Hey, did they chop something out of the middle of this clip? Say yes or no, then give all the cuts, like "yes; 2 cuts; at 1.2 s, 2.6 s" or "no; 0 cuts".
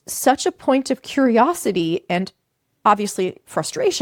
no; 0 cuts